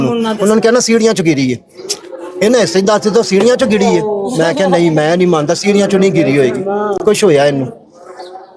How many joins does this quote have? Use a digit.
0